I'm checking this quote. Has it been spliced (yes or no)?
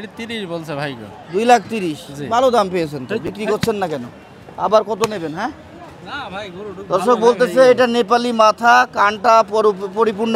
no